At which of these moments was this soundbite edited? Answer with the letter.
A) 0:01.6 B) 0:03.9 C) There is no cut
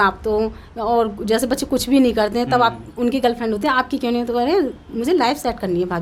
C